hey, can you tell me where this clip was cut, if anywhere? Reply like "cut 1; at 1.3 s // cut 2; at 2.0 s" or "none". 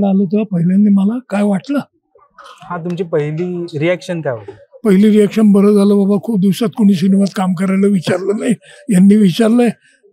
none